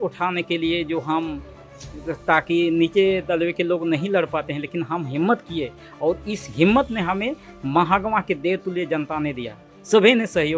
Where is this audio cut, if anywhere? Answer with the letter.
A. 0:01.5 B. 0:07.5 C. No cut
C